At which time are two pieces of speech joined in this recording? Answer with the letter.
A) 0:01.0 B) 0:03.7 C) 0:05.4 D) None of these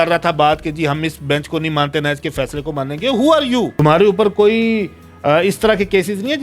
B